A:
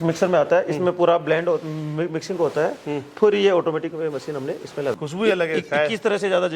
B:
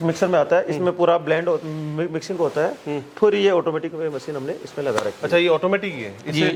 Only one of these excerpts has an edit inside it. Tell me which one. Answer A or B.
A